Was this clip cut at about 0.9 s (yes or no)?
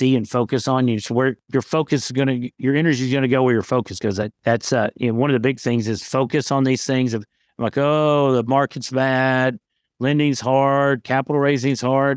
no